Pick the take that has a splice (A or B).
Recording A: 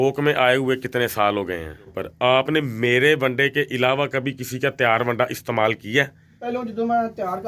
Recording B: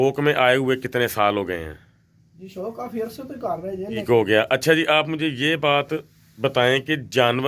A